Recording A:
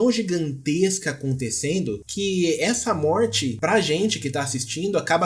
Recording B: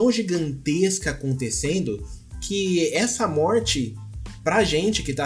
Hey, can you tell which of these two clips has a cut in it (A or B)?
A